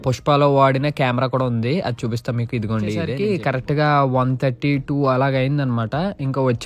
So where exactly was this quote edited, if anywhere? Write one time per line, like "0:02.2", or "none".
0:03.1